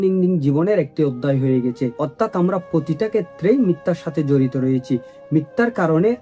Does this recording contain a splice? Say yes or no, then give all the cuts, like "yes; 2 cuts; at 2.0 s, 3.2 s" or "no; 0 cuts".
no; 0 cuts